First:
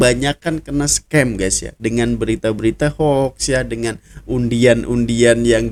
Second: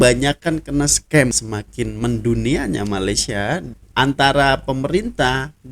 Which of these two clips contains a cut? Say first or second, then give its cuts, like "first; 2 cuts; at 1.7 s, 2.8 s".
second; 2 cuts; at 1.3 s, 3.7 s